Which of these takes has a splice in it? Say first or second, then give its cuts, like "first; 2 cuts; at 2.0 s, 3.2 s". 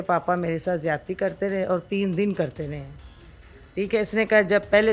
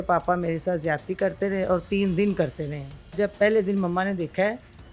second; 1 cut; at 3.1 s